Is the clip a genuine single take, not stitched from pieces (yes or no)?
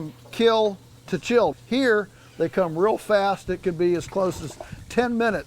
no